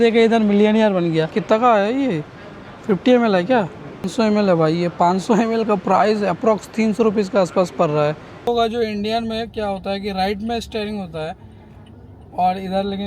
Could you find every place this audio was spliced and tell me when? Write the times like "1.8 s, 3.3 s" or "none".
1.3 s, 4.1 s, 8.5 s